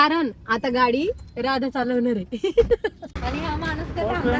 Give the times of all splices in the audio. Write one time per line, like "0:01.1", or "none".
0:03.1

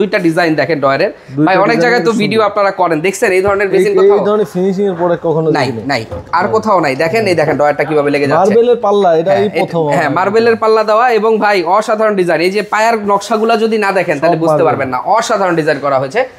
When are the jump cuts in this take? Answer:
none

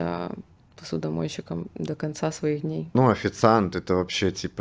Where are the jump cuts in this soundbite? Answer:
0:02.9

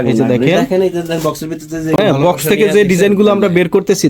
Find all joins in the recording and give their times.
0:02.0

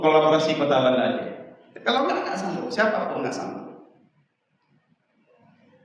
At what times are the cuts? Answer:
none

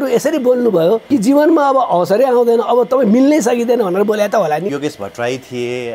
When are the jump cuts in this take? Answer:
0:01.0
0:04.7

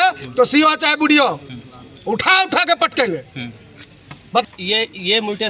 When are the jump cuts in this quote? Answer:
0:04.5

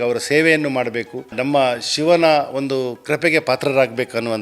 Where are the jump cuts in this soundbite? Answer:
0:01.4

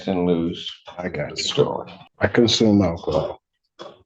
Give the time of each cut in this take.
0:02.0

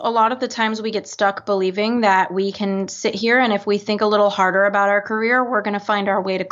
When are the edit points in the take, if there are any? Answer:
none

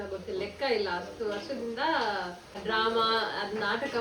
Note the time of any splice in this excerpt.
0:02.5

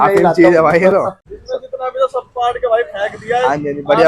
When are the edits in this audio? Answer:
0:01.3

